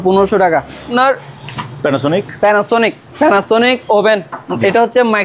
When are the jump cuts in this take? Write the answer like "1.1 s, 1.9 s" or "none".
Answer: 0.9 s